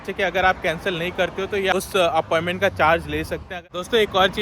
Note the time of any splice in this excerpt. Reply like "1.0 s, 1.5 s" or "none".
1.7 s, 3.5 s